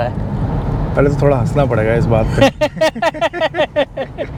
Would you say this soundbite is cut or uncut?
uncut